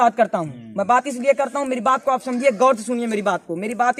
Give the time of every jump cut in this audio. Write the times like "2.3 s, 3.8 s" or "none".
none